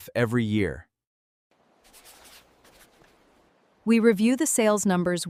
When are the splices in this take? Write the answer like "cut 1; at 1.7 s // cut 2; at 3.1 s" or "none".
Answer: none